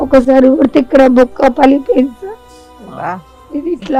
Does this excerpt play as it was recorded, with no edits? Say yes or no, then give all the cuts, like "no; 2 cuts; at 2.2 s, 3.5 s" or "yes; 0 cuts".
yes; 0 cuts